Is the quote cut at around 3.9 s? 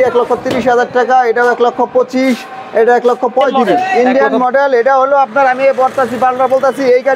yes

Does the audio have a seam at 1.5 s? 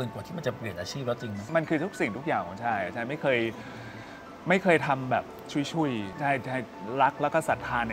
yes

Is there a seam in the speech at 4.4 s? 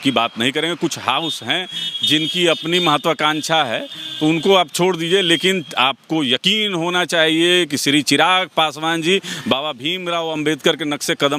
no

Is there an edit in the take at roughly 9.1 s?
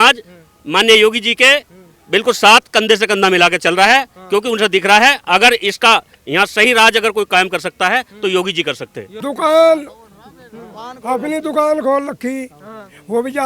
yes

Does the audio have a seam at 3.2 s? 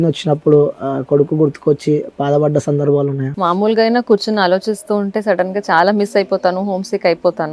yes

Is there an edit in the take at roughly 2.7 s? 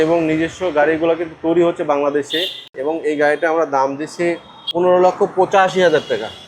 yes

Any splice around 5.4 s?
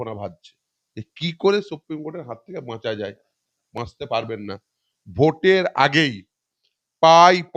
no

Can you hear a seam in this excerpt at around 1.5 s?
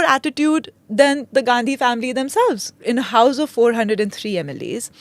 no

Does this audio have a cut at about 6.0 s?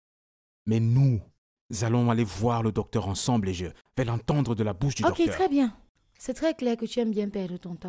no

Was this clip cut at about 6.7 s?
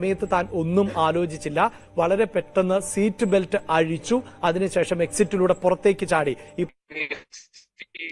yes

